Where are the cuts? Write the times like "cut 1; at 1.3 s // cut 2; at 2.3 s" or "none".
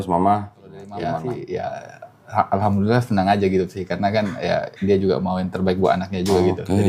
cut 1; at 1.1 s